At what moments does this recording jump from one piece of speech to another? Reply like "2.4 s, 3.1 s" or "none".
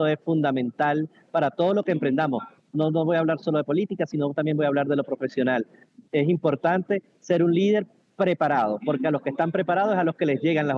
none